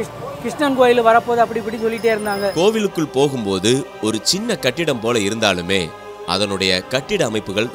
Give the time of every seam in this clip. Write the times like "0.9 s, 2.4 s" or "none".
2.5 s